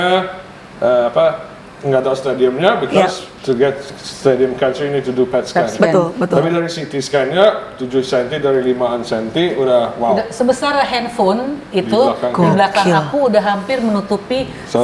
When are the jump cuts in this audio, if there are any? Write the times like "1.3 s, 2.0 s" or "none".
none

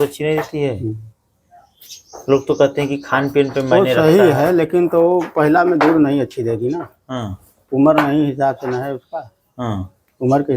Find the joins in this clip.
none

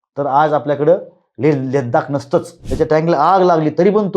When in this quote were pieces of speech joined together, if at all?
2.6 s

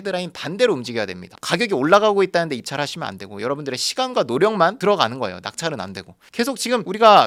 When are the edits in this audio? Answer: none

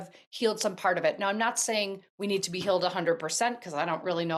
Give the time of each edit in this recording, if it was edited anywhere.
none

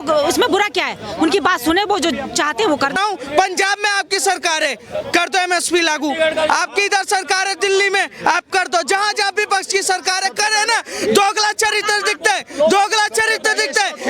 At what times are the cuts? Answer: 2.9 s

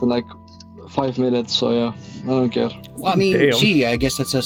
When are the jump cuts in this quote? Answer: none

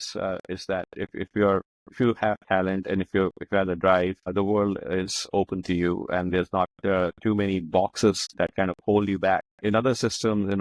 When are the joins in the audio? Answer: none

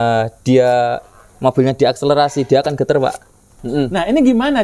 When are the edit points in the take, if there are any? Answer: 3.6 s

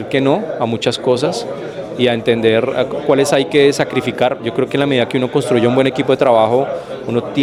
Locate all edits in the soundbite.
none

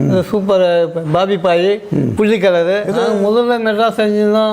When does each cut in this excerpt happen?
3.0 s

